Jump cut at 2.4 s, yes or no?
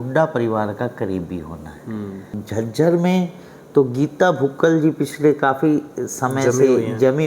yes